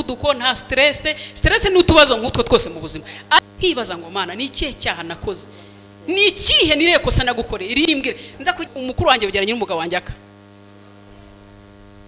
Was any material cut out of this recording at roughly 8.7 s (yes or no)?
yes